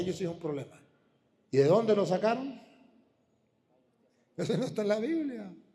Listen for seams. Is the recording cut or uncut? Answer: uncut